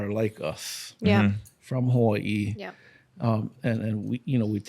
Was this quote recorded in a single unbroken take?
yes; 0 cuts

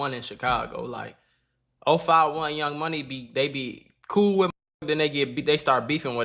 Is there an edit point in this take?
no; 0 cuts

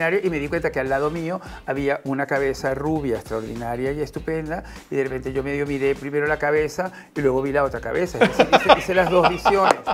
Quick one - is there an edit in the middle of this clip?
no; 0 cuts

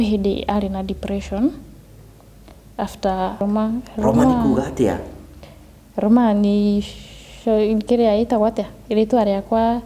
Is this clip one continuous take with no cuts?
no; 1 cut; at 3.4 s

